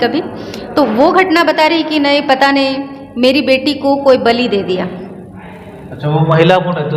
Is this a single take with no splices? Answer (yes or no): yes